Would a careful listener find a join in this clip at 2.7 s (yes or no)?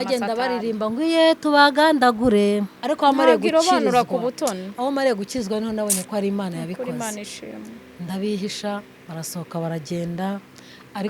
yes